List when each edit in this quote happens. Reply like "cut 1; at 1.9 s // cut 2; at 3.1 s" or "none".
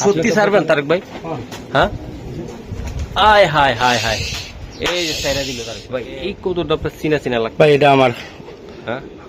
cut 1; at 5.7 s

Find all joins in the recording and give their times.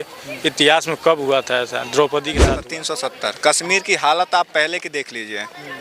cut 1; at 2.6 s

